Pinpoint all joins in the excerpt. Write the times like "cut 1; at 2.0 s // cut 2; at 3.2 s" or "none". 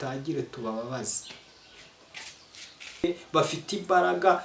cut 1; at 3.0 s